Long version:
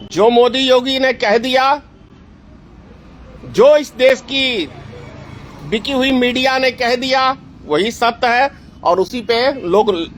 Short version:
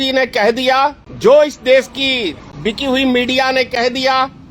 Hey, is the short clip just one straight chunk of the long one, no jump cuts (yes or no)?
no